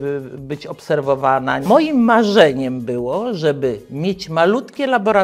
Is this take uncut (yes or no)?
no